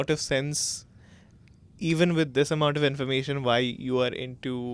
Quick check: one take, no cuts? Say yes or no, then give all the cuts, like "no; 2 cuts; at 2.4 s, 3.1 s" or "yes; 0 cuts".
yes; 0 cuts